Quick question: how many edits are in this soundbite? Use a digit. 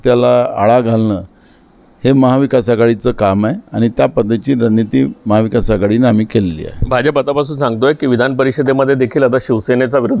0